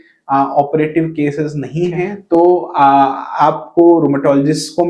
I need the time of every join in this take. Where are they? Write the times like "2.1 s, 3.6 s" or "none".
2.2 s